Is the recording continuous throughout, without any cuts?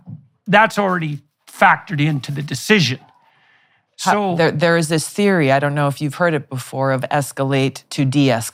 yes; 0 cuts

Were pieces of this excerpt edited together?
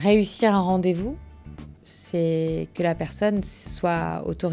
no; 0 cuts

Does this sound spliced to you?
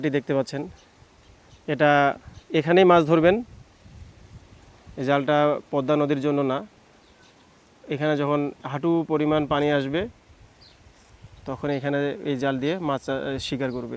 no; 0 cuts

